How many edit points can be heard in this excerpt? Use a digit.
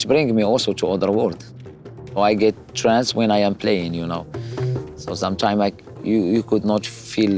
1